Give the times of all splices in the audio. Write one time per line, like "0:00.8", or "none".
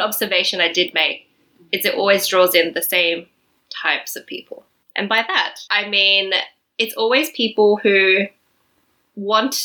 none